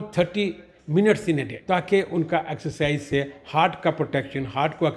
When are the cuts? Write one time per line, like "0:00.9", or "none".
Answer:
0:01.5